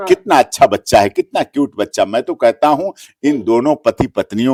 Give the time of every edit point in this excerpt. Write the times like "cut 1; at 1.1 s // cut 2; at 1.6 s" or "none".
none